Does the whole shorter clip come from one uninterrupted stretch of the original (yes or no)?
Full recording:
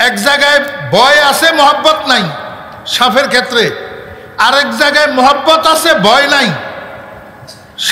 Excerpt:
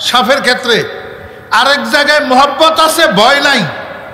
yes